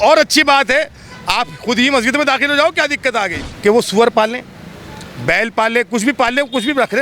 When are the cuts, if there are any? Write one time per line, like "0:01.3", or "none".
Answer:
0:03.4